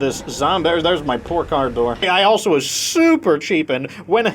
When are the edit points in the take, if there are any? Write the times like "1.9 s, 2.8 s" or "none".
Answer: 2.0 s